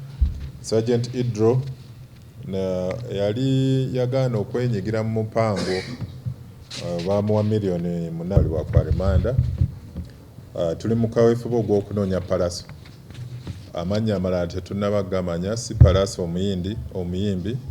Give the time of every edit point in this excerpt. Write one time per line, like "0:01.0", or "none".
0:08.3